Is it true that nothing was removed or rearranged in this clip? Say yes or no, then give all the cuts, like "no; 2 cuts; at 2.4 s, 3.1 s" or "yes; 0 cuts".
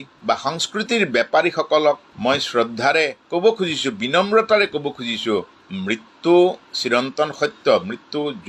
no; 1 cut; at 5.5 s